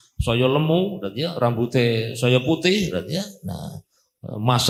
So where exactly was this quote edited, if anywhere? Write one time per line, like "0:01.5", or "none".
none